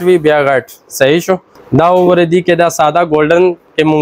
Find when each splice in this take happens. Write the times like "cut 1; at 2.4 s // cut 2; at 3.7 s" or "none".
cut 1; at 1.5 s